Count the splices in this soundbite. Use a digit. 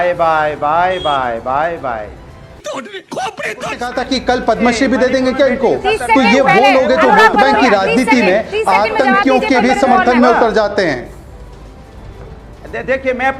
1